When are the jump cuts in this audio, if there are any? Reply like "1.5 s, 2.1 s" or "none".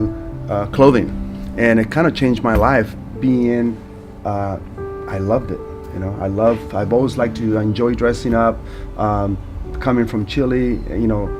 none